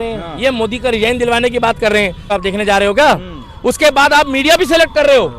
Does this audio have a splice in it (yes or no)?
yes